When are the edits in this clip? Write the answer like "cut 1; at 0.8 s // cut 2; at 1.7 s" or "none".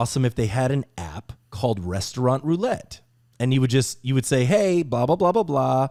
none